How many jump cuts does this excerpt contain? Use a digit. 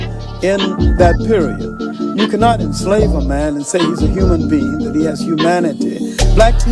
0